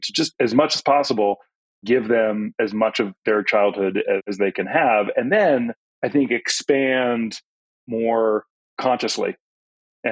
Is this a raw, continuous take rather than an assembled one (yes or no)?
yes